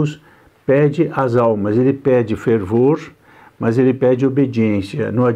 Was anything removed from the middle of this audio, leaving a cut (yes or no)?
no